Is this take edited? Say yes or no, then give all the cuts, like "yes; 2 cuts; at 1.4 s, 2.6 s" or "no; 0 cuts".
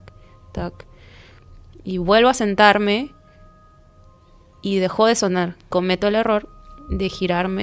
yes; 1 cut; at 5.6 s